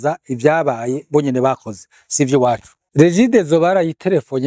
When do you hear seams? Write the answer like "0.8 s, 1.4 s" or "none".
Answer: 2.8 s